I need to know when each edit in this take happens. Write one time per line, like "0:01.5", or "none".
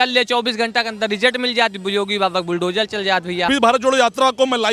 0:03.5